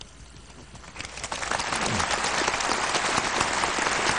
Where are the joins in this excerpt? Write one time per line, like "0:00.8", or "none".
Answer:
none